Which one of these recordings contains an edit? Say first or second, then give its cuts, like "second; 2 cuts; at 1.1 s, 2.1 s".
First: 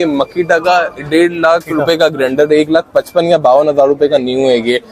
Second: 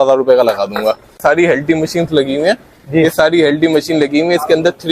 second; 1 cut; at 1.2 s